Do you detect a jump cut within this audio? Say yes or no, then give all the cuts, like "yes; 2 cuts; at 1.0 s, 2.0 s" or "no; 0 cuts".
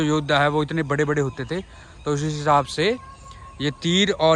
no; 0 cuts